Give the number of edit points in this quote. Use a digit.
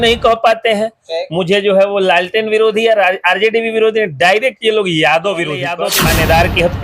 1